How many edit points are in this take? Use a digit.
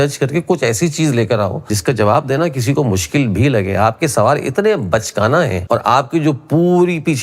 2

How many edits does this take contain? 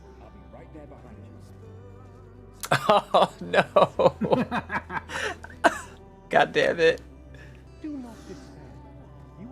1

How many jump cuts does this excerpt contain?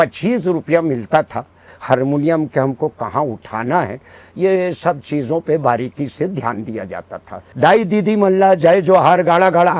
2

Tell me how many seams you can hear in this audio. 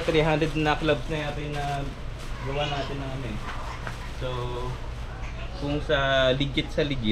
0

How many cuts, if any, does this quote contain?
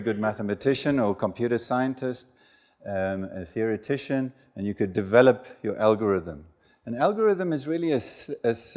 0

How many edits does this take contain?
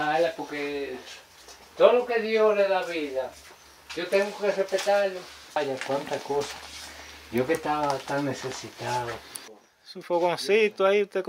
2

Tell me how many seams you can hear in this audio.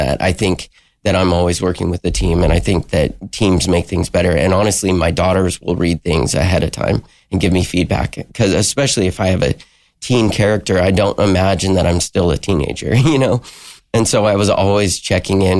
0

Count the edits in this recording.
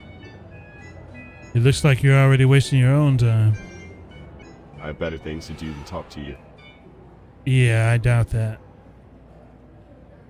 1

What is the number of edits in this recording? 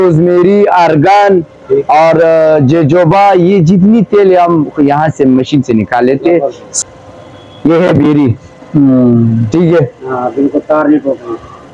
1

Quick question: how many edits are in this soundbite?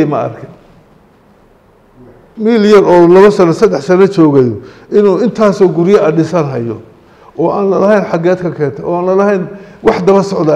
1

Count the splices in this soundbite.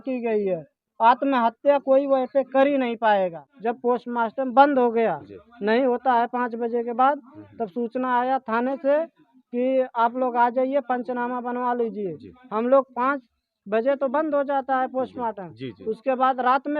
1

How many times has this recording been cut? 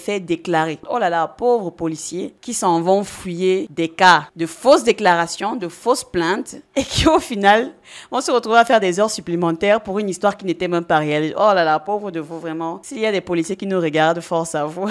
2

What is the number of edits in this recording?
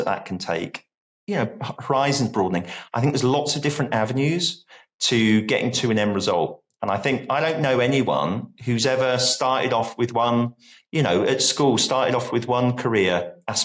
0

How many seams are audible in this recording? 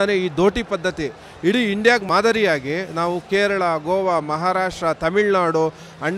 1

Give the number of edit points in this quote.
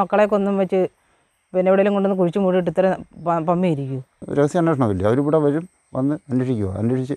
1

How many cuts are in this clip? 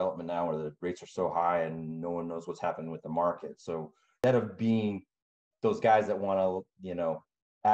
1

